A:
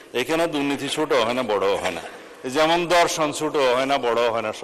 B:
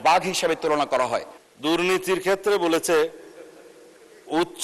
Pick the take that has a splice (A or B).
B